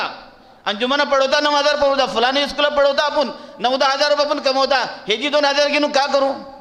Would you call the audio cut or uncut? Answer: uncut